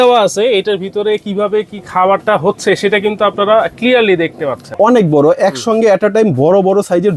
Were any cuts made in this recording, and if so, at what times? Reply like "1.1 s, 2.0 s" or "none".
4.7 s